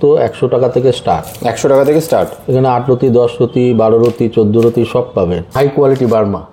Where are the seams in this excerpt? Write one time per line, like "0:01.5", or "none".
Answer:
0:05.5